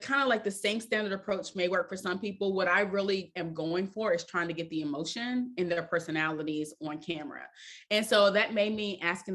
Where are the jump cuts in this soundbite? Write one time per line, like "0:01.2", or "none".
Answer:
none